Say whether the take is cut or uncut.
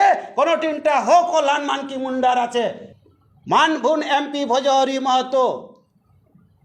cut